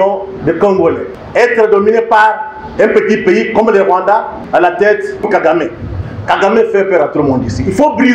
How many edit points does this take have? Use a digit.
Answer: 2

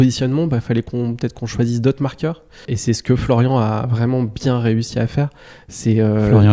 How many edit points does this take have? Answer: 0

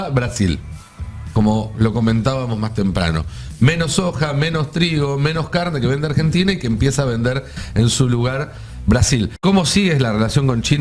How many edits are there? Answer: 1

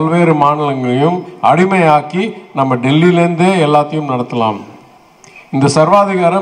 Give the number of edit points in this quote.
0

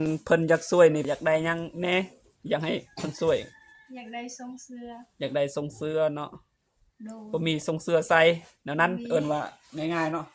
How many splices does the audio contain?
1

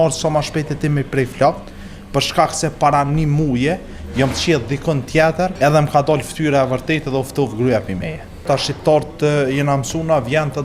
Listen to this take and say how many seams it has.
2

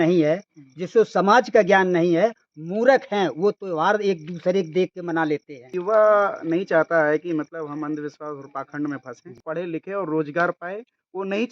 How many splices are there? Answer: 2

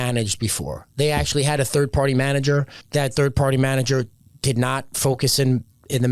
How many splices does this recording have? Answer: 1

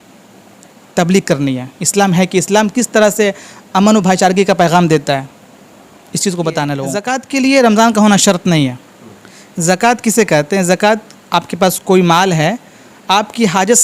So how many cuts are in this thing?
1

